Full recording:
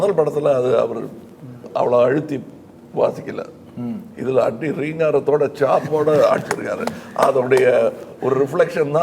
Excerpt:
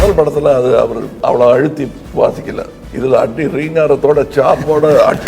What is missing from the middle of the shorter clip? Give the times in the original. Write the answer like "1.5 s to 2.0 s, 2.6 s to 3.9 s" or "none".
1.1 s to 1.6 s, 2.5 s to 2.8 s, 3.6 s to 4.1 s

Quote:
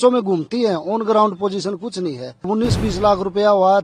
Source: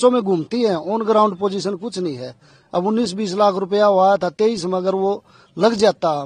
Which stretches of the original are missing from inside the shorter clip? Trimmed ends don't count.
2.5 s to 2.8 s

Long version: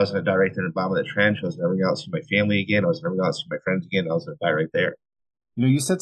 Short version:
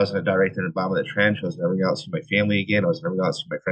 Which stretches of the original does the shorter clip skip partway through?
none

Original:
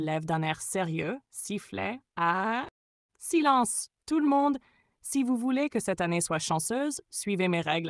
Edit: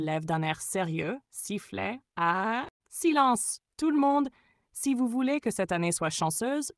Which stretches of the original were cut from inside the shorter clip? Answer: 2.8 s to 3.1 s

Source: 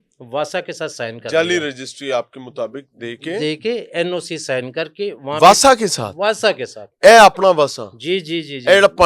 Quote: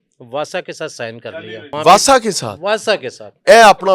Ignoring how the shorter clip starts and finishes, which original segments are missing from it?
1.3 s to 4.9 s

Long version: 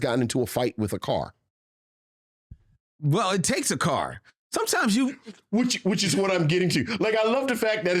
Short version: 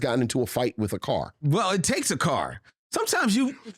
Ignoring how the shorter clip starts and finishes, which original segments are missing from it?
1.3 s to 2.9 s

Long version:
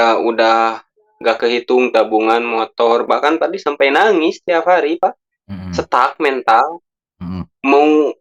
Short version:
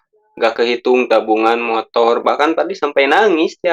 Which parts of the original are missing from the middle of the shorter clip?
none

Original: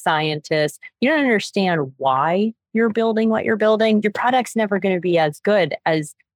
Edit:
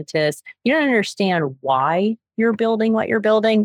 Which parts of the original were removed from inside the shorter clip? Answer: none

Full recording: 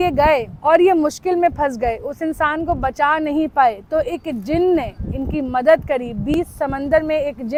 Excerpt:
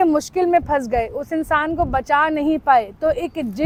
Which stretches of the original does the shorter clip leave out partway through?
none

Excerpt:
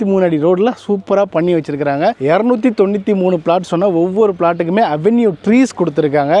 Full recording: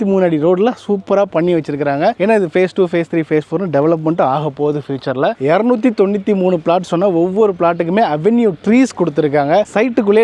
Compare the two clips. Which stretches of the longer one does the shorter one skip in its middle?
2.2 s to 5.4 s

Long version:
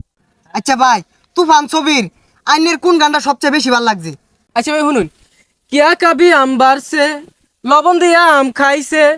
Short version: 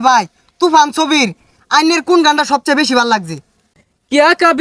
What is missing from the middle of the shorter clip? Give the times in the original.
4.4 s to 5.2 s

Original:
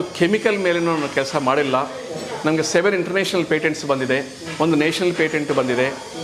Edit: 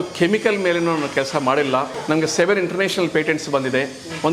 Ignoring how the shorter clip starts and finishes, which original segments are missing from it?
1.9 s to 2.3 s

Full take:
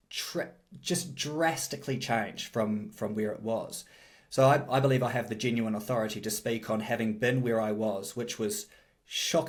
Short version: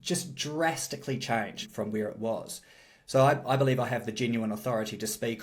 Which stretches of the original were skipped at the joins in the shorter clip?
2.5 s to 2.9 s

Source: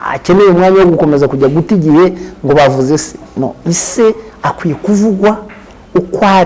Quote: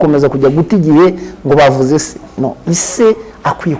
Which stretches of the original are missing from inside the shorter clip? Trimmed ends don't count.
none

